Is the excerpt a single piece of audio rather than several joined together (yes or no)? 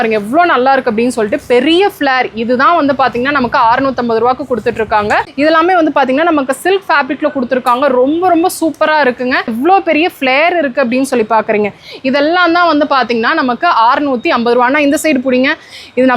no